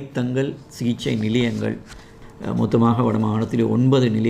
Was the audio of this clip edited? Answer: yes; 1 cut; at 2.1 s

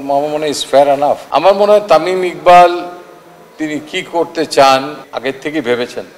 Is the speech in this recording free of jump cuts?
no; 2 cuts; at 1.2 s, 5.0 s

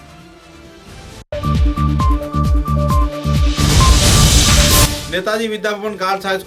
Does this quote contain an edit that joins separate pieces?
no; 0 cuts

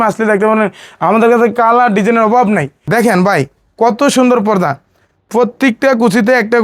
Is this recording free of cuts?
no; 1 cut; at 2.8 s

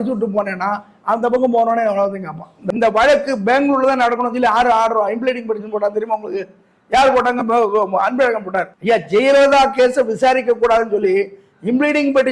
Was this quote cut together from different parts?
yes; 2 cuts; at 2.5 s, 8.7 s

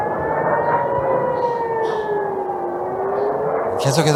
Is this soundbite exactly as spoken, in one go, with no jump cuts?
yes; 0 cuts

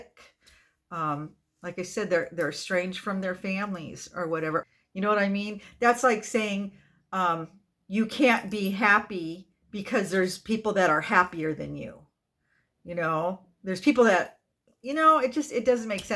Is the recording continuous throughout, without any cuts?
no; 1 cut; at 4.6 s

